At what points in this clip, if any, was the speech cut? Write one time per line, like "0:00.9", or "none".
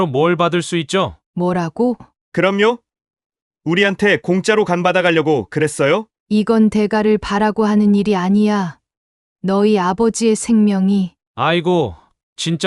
0:01.2
0:02.1
0:06.2